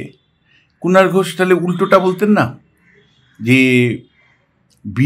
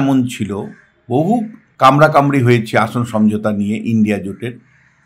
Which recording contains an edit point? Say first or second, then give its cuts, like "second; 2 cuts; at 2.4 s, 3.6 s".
second; 1 cut; at 1.6 s